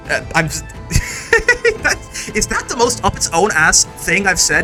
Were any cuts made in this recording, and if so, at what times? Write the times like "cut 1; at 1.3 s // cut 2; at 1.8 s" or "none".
none